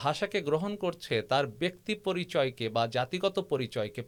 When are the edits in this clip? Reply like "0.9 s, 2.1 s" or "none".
none